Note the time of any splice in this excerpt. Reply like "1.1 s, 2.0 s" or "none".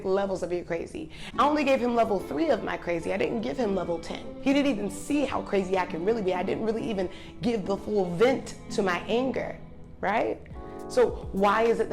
1.2 s, 4.3 s